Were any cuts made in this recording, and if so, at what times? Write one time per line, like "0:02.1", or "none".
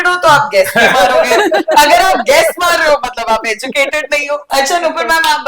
0:04.4